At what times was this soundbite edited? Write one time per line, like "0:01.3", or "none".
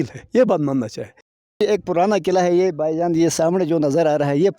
0:01.6